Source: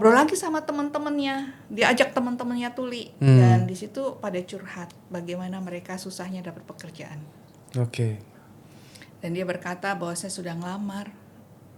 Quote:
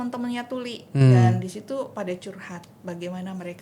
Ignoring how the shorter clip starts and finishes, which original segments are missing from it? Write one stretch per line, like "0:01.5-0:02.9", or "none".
none